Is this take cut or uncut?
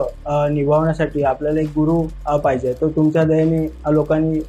uncut